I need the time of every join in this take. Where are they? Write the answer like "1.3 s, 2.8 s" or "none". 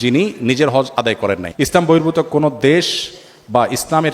1.5 s